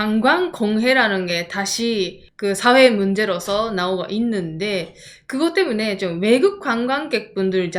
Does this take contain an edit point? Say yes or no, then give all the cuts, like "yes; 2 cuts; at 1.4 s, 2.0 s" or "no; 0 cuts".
no; 0 cuts